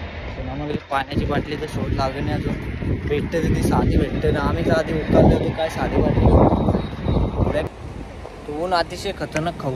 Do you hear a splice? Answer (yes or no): yes